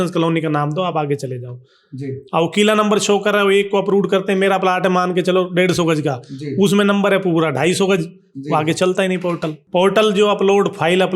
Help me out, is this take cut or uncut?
cut